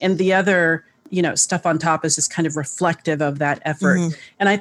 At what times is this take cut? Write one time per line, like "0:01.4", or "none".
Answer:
0:01.1